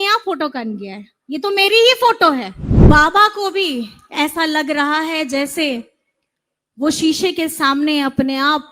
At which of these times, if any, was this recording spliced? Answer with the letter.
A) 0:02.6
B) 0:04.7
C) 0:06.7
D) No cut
A